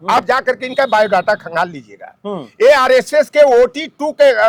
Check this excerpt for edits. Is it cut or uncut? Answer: uncut